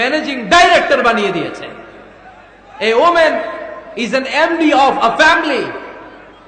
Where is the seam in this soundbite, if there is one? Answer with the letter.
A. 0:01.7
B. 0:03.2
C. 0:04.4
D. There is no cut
D